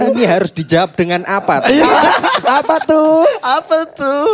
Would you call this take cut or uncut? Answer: uncut